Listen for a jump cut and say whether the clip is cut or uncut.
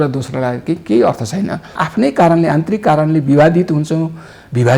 cut